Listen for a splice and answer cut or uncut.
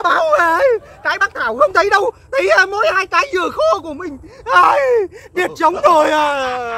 uncut